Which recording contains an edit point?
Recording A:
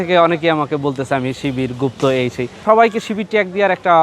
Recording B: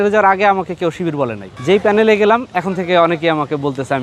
A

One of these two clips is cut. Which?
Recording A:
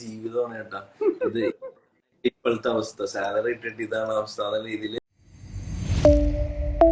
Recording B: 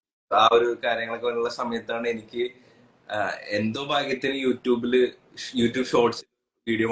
A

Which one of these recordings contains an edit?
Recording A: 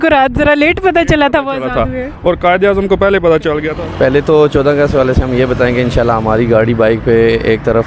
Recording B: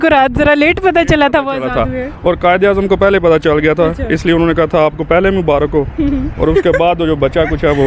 A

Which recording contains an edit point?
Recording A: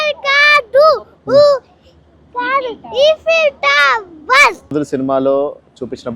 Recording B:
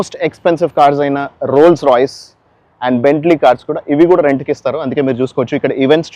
A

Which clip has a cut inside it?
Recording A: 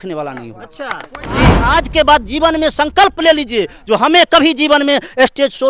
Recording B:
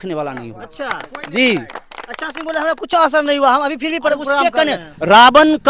A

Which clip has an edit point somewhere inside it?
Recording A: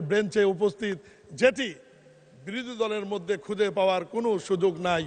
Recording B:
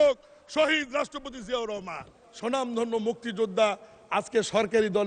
B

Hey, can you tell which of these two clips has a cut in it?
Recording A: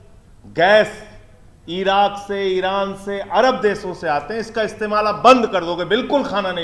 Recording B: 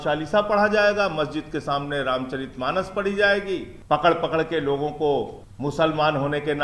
B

